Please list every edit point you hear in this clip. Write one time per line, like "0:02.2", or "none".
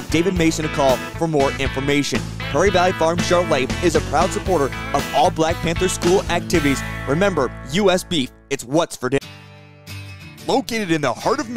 0:09.2

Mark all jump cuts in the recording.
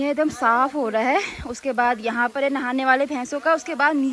none

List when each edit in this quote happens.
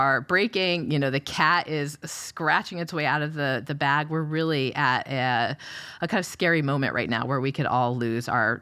none

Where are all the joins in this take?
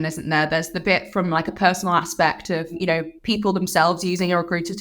0:02.7

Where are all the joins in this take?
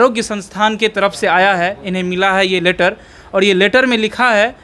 none

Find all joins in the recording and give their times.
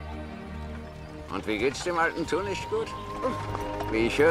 0:03.0

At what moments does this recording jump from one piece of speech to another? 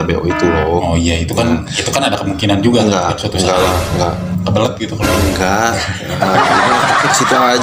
none

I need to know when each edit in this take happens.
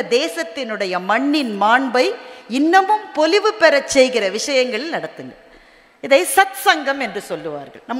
none

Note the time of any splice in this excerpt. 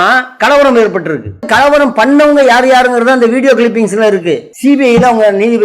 0:01.5
0:04.5

